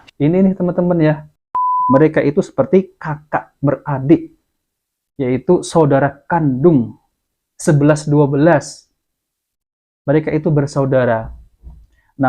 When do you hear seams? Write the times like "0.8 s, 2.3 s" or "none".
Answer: 1.4 s